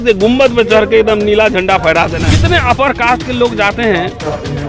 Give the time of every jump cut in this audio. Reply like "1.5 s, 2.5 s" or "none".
2.3 s

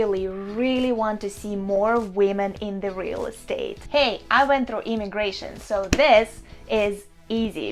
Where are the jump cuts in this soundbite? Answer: 3.8 s

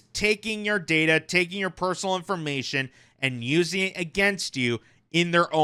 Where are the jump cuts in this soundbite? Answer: none

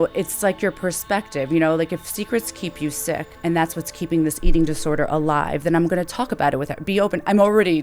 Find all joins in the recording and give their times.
3.3 s

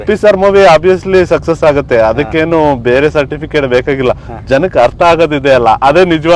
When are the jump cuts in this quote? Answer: none

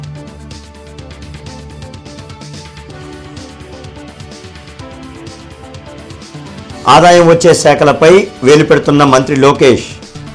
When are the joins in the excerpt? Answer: none

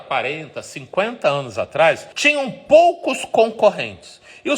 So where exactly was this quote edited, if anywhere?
2.1 s

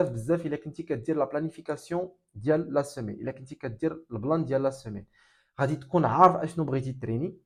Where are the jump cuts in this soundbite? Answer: none

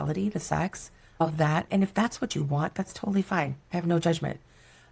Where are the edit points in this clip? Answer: none

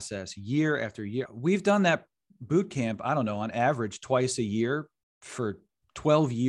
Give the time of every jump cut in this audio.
1.3 s

